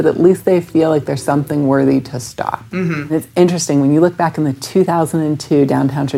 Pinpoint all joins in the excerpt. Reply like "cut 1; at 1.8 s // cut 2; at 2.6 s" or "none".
cut 1; at 3.1 s